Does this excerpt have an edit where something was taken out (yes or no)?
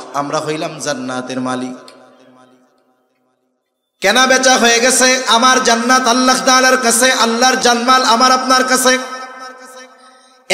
yes